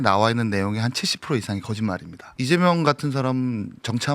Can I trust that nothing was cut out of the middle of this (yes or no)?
no